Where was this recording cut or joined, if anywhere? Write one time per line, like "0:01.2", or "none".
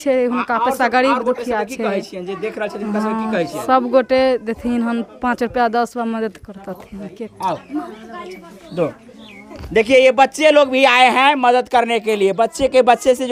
none